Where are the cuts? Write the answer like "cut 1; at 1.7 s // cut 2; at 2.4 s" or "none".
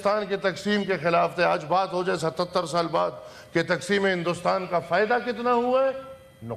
none